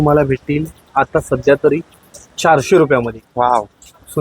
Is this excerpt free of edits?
yes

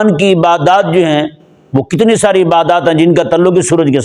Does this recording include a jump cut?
no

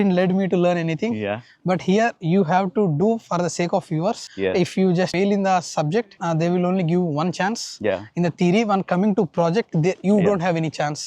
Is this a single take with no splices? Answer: yes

